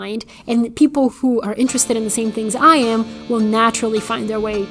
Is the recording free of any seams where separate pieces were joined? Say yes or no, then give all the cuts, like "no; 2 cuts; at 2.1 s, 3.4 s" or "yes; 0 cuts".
yes; 0 cuts